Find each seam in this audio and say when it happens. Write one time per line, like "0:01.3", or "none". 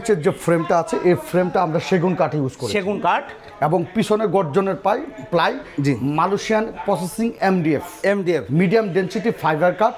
none